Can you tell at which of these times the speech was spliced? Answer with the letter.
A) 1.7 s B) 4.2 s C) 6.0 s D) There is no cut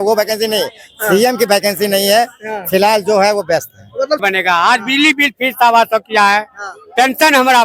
B